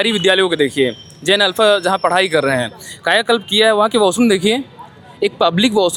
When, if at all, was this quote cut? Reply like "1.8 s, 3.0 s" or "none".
none